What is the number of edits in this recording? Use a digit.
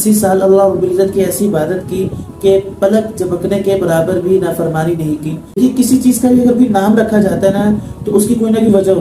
1